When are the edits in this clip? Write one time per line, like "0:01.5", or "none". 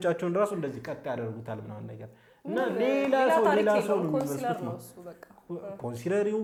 none